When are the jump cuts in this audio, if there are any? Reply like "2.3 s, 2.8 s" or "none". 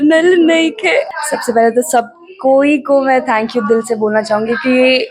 1.2 s